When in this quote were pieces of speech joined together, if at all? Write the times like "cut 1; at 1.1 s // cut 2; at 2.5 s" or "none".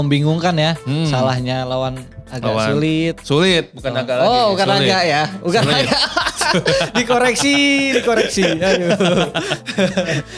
none